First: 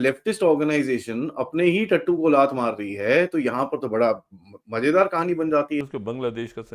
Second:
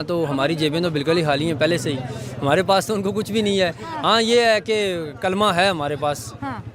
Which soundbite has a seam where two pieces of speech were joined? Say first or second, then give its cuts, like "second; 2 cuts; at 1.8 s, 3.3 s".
first; 1 cut; at 5.8 s